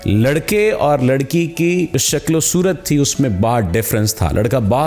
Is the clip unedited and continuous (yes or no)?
no